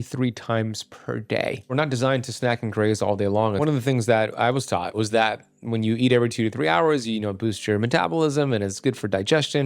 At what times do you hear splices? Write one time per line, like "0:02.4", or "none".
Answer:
0:01.7
0:03.6
0:05.0